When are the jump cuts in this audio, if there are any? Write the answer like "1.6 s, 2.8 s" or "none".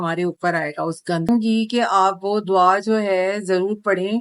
1.3 s